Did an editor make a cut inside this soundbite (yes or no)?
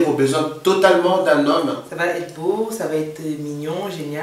yes